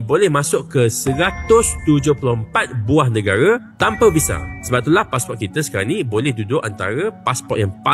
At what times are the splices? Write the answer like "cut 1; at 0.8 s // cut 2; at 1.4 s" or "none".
none